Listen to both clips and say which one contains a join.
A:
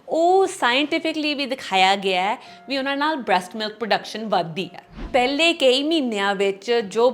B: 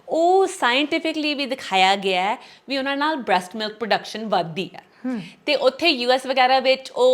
A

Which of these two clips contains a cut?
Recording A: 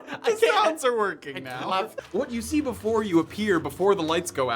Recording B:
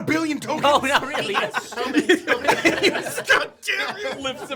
A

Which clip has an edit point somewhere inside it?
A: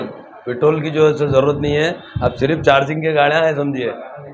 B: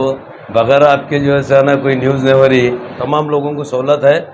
B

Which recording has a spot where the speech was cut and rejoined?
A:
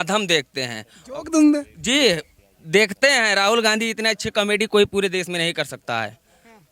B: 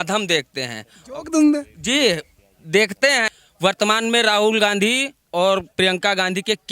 B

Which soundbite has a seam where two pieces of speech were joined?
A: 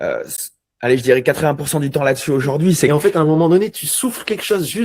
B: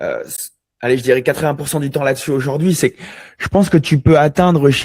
A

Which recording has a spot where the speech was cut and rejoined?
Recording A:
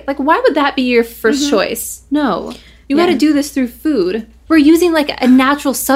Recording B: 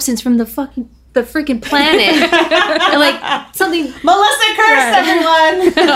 A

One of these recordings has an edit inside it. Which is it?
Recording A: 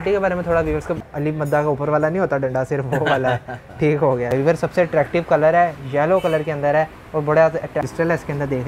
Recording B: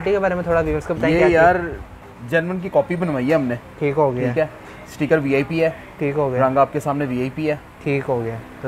A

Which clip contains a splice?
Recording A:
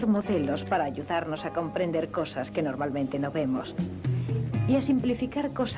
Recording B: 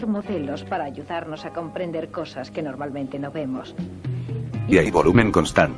A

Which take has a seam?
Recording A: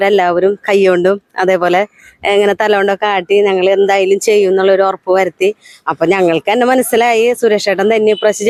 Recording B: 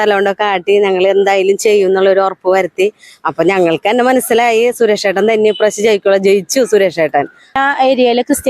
B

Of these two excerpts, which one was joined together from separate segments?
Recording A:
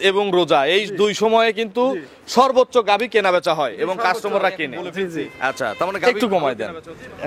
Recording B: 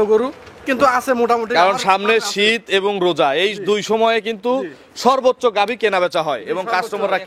A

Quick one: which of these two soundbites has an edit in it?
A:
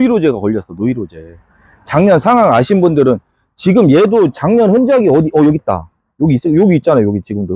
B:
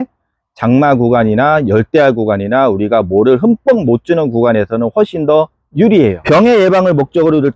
B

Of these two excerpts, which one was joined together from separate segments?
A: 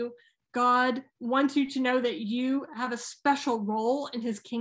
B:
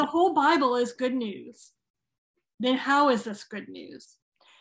A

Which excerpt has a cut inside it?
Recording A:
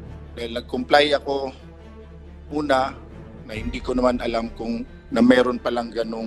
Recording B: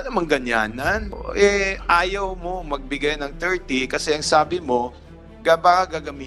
B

